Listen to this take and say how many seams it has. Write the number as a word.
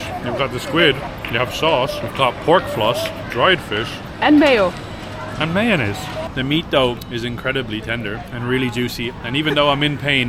six